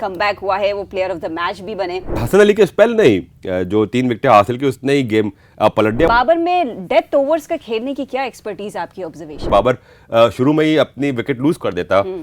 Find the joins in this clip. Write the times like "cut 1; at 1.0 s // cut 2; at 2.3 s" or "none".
cut 1; at 2.2 s // cut 2; at 6.1 s // cut 3; at 9.5 s